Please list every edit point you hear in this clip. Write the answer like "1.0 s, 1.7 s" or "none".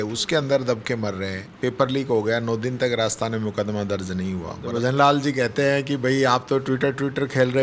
1.4 s, 4.6 s

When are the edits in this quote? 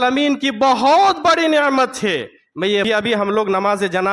2.8 s

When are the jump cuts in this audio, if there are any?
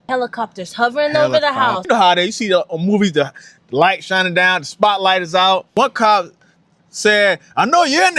1.8 s, 5.7 s

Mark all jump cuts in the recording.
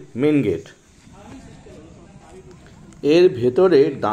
none

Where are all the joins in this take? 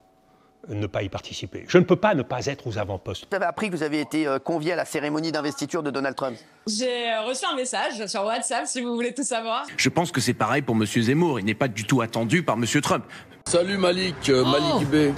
3.3 s, 9.7 s, 13.4 s

